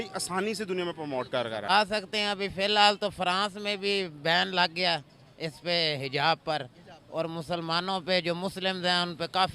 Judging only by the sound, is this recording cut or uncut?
cut